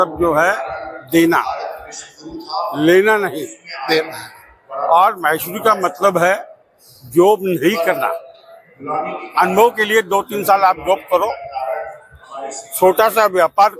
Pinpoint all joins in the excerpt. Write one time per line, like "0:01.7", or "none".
none